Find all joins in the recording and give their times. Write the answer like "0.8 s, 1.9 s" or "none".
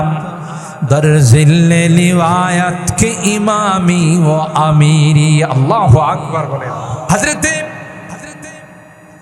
7.0 s